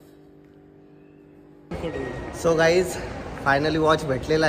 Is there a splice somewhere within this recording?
yes; 1 cut; at 1.8 s

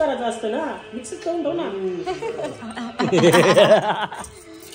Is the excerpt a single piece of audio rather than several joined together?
yes; 0 cuts

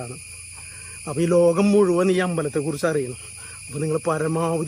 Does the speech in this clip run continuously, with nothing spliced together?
yes; 0 cuts

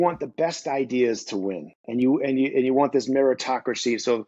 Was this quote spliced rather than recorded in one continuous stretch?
no; 0 cuts

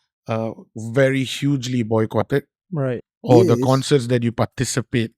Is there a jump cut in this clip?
yes; 1 cut; at 3.0 s

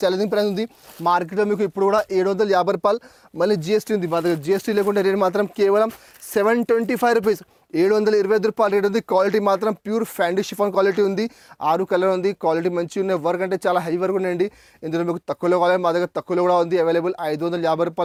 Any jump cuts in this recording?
no; 0 cuts

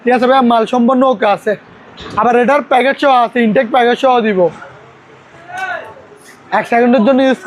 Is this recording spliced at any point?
yes; 1 cut; at 4.7 s

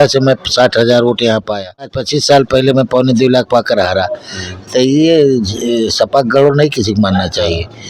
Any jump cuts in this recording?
yes; 1 cut; at 2.0 s

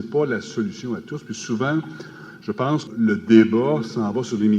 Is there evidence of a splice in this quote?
yes; 1 cut; at 2.9 s

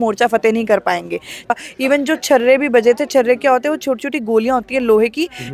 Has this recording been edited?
yes; 1 cut; at 1.5 s

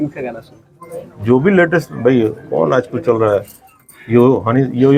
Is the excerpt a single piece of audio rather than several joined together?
yes; 0 cuts

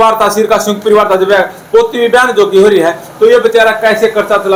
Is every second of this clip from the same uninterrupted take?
yes; 0 cuts

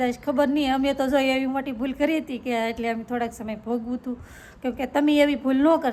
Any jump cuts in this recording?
no; 0 cuts

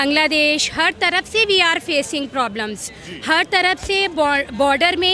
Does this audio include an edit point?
no; 0 cuts

